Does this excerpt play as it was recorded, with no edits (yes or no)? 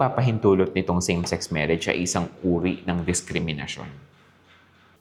yes